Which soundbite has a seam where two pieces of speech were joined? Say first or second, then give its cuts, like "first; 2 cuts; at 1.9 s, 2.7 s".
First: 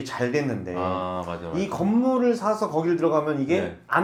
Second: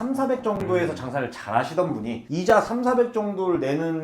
second; 1 cut; at 2.2 s